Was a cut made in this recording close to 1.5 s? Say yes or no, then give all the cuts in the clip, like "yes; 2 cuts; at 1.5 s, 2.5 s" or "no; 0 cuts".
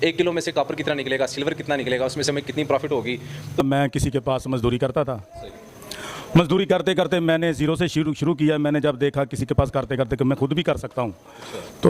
no; 1 cut; at 3.6 s